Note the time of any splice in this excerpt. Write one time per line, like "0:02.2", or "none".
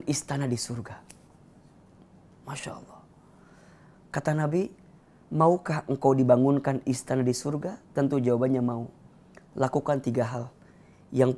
none

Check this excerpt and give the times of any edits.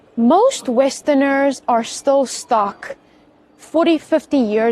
none

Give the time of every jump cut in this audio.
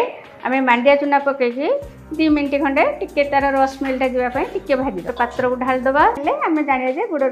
0:05.1
0:06.2

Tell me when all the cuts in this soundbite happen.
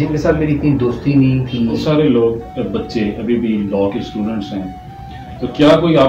0:01.8

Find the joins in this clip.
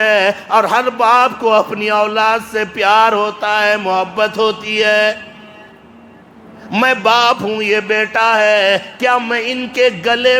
none

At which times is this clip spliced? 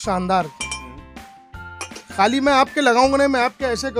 none

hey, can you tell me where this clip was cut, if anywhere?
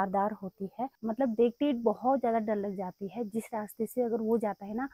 0:01.0

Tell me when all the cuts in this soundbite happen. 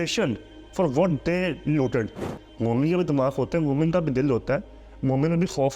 0:02.2

